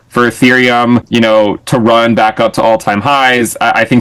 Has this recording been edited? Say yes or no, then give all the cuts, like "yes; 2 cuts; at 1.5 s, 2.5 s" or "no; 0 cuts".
yes; 1 cut; at 1.1 s